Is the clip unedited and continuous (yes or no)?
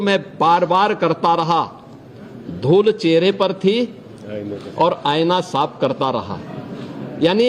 yes